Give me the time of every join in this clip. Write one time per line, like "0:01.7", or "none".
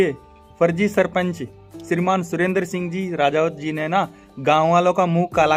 none